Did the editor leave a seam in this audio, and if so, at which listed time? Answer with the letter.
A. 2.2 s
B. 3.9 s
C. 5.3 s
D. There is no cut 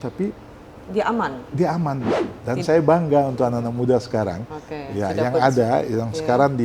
A